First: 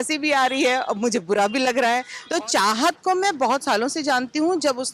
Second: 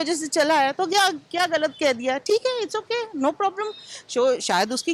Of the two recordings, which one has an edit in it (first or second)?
first